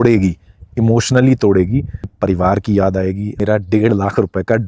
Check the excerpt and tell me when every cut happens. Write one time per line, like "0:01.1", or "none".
0:02.1
0:03.4